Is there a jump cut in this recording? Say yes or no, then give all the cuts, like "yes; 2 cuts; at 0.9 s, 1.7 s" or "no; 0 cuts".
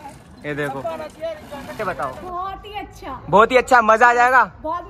yes; 1 cut; at 1.8 s